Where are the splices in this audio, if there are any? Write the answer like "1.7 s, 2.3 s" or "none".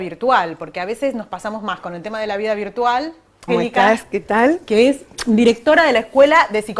none